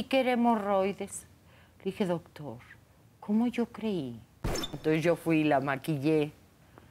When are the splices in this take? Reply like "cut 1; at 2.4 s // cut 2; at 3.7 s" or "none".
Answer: cut 1; at 4.7 s